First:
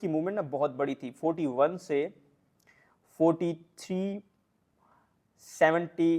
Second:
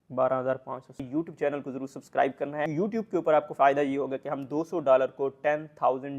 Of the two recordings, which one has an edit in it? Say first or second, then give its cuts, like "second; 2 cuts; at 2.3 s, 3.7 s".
second; 2 cuts; at 1.0 s, 2.7 s